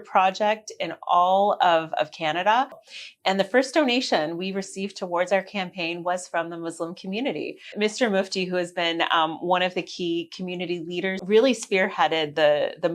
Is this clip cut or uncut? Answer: cut